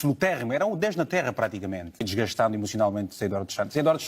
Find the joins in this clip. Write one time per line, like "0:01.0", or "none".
0:02.1